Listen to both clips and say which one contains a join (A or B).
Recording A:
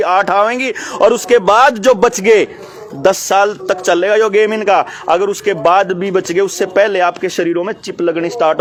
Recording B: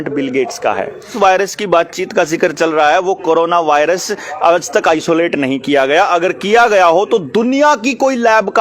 B